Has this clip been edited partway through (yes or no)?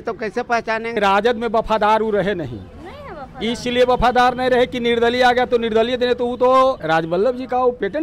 yes